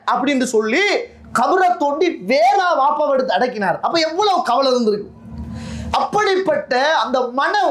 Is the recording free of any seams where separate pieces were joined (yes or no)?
yes